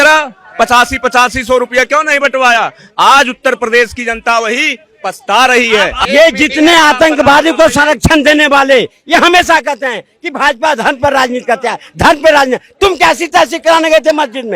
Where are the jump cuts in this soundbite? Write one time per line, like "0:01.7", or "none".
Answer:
0:06.0

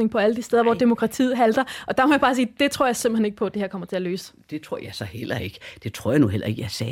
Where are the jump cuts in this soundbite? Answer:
none

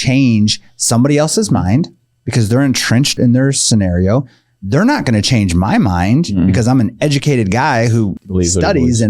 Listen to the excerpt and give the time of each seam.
0:03.2
0:08.1

